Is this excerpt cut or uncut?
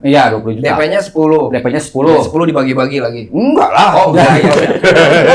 uncut